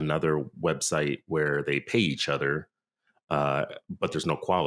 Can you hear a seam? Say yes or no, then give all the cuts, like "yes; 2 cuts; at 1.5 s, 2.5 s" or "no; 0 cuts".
no; 0 cuts